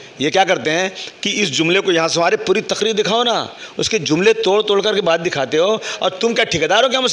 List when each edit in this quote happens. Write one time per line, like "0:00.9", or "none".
none

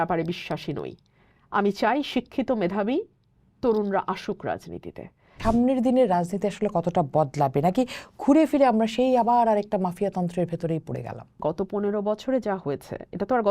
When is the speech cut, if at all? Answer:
0:05.4
0:11.3

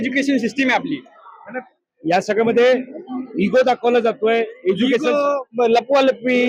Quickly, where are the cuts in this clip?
none

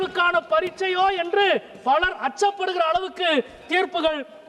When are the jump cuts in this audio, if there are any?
none

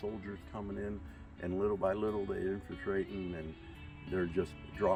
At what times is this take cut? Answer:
none

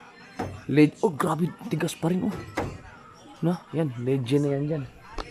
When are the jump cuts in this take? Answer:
none

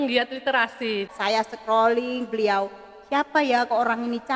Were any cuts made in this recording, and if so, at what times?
0:01.1

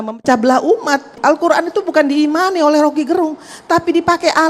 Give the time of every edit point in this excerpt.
0:01.2

